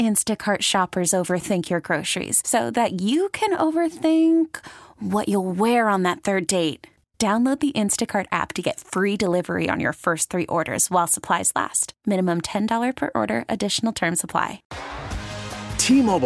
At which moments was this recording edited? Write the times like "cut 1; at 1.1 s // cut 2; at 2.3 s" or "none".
cut 1; at 14.7 s